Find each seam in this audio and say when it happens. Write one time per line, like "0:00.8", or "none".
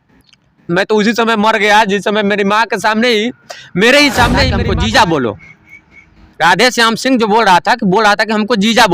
0:04.6

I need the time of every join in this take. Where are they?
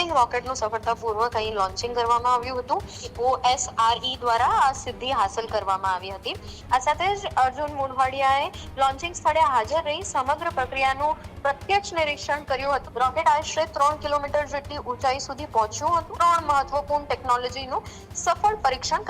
0:03.0
0:06.5
0:12.8
0:16.1

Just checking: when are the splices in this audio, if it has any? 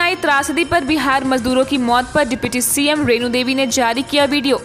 none

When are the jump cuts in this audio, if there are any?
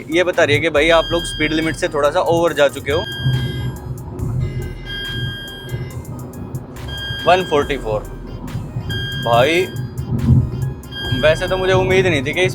0:03.2

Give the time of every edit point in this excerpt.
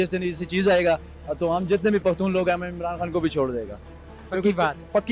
none

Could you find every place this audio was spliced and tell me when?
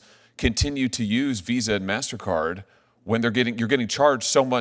none

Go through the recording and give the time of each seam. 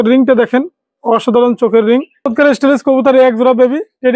0:02.2

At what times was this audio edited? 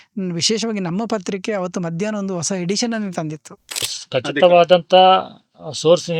0:03.9

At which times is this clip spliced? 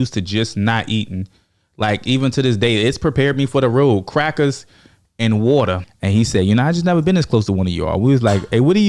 0:05.9

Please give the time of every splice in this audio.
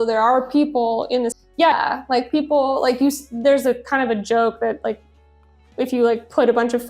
0:01.8

